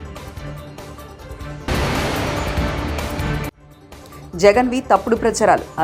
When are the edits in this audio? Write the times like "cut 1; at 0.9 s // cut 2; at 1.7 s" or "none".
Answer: cut 1; at 1.6 s // cut 2; at 3.6 s

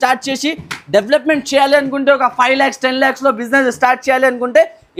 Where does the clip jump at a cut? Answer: none

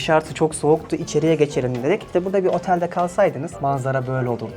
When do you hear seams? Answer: cut 1; at 2.0 s // cut 2; at 3.5 s

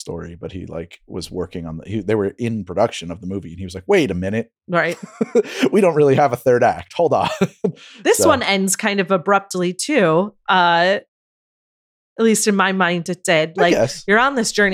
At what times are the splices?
none

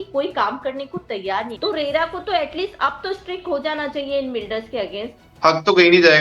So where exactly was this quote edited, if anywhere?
cut 1; at 1.5 s // cut 2; at 5.2 s

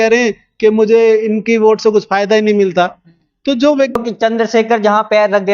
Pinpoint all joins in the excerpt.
cut 1; at 4.0 s

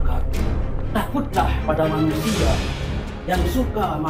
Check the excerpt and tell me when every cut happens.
none

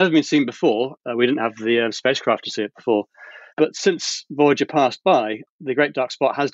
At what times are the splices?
cut 1; at 1.0 s // cut 2; at 3.5 s // cut 3; at 5.4 s

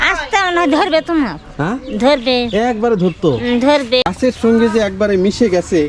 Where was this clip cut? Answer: cut 1; at 4.1 s

